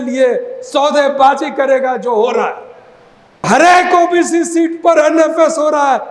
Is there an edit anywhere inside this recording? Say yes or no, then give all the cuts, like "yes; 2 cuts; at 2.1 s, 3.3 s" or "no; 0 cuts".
yes; 1 cut; at 3.5 s